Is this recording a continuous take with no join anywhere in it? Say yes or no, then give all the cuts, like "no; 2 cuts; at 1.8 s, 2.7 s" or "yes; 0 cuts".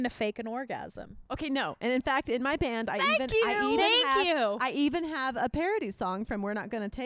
yes; 0 cuts